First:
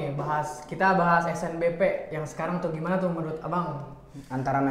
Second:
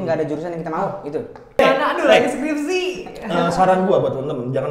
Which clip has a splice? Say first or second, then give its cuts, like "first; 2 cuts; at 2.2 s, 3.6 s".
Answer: second; 1 cut; at 1.6 s